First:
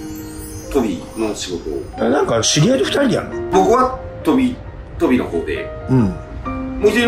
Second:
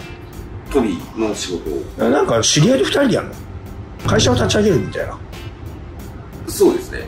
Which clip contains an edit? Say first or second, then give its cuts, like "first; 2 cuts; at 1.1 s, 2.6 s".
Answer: first; 1 cut; at 3.4 s